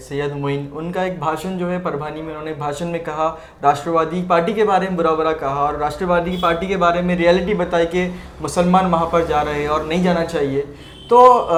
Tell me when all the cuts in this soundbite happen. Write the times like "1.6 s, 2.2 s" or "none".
none